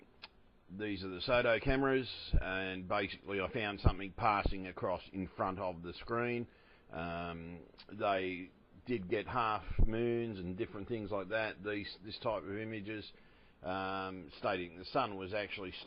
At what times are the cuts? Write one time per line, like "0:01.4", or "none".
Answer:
0:12.6